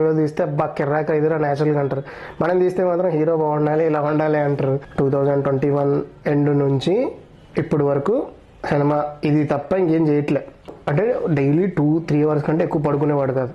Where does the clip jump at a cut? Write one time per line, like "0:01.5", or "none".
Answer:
0:04.9
0:10.8